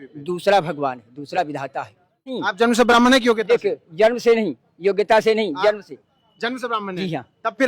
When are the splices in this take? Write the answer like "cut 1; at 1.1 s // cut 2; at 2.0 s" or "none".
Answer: cut 1; at 2.5 s